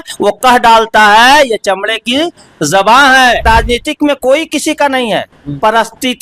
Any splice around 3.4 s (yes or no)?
yes